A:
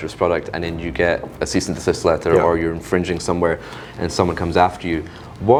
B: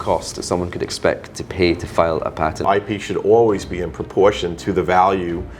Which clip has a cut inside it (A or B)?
B